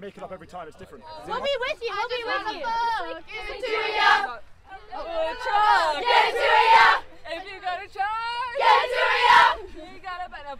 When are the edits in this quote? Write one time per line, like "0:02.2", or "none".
0:01.2